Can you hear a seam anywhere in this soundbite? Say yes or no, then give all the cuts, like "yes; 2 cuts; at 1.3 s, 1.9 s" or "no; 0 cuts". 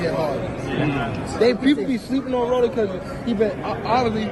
no; 0 cuts